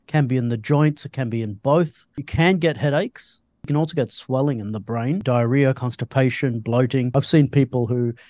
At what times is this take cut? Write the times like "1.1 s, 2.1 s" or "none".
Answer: 2.2 s, 3.6 s, 5.2 s, 7.1 s